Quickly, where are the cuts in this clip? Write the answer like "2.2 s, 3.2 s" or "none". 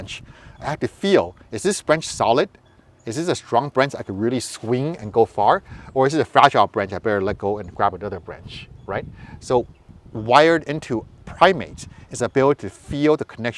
none